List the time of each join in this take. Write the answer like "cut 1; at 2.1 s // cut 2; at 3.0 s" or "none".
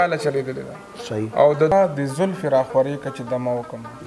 cut 1; at 1.7 s